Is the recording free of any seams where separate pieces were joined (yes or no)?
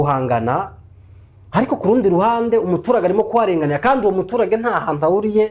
yes